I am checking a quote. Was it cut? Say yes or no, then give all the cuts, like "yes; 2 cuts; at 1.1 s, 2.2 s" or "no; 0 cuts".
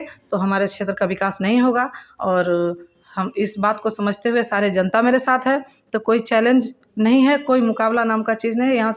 no; 0 cuts